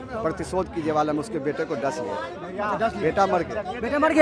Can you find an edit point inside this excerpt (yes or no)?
no